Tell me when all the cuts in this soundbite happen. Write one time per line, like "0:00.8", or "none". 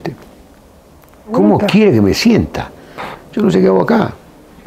0:01.3